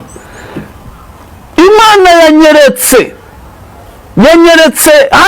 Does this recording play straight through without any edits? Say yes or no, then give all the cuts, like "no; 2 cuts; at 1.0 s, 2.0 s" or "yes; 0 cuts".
yes; 0 cuts